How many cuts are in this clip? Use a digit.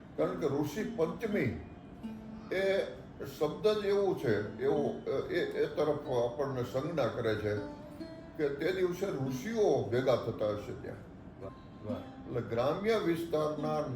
1